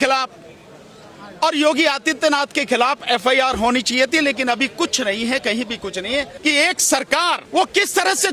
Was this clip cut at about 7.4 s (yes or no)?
yes